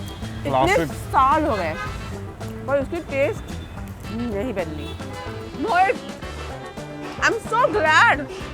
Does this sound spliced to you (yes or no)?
yes